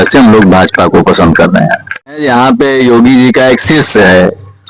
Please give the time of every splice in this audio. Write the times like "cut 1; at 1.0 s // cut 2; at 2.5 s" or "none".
cut 1; at 2.2 s